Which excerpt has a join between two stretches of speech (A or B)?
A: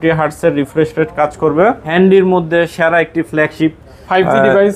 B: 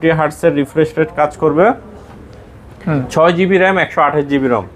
A